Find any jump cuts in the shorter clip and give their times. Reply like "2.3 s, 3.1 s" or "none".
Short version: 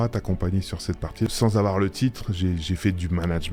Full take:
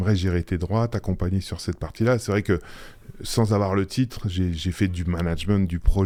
1.3 s